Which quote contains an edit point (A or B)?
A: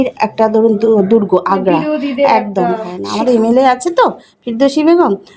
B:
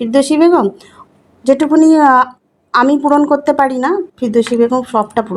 A